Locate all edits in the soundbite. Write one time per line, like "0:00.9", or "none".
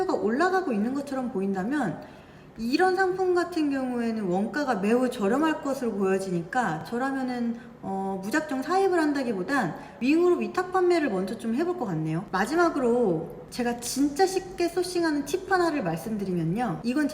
0:12.3

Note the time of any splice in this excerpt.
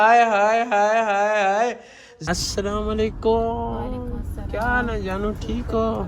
0:01.9

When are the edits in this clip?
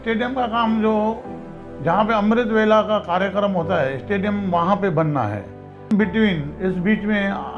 0:05.9

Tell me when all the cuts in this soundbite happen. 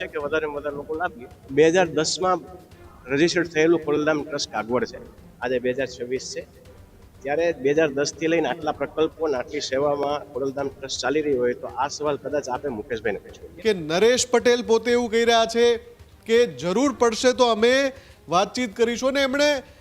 0:01.4
0:13.4

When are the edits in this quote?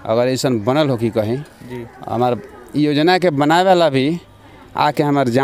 none

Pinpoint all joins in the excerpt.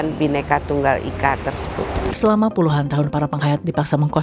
0:02.1

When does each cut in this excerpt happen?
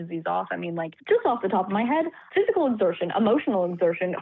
0:01.0

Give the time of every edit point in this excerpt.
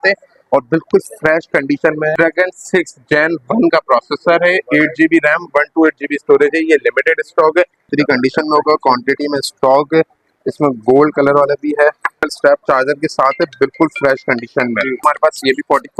0:02.1
0:07.8
0:12.3
0:15.0

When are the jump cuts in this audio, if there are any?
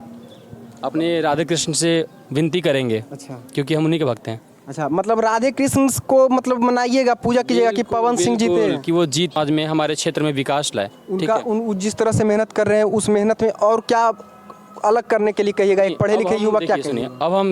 0:09.4

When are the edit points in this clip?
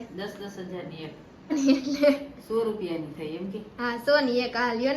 0:01.5

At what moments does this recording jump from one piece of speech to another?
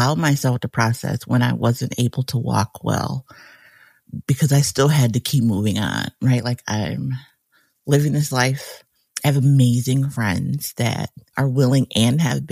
none

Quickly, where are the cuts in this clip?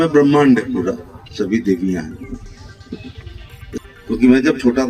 0:03.8

